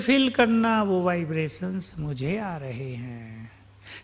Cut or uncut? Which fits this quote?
uncut